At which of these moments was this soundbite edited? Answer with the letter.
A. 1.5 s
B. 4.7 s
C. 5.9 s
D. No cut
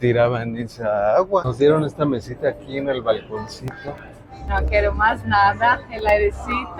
A